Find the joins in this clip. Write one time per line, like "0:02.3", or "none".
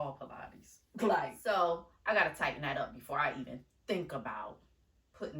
0:01.4